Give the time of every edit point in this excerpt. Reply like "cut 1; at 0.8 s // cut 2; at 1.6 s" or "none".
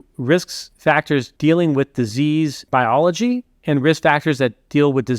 cut 1; at 1.0 s // cut 2; at 2.6 s